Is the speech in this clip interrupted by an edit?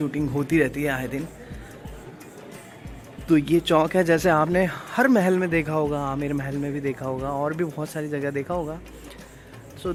no; 0 cuts

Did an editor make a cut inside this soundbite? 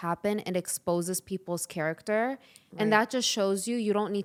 no; 0 cuts

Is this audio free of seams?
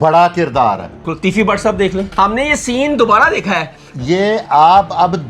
no; 2 cuts; at 1.1 s, 2.1 s

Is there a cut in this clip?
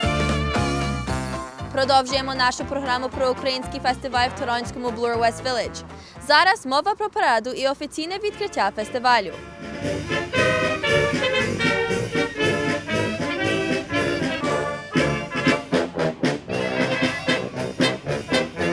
yes; 1 cut; at 17.0 s

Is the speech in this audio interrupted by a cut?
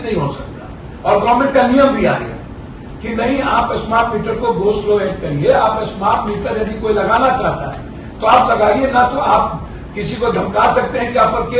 no; 0 cuts

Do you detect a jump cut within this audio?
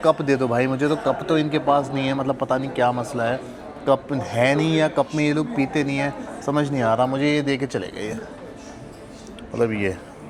no; 0 cuts

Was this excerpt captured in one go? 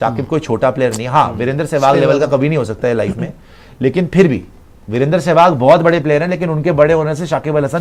yes; 0 cuts

